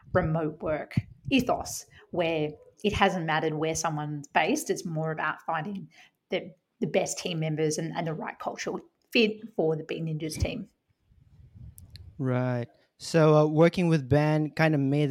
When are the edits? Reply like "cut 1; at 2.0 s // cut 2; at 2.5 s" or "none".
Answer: none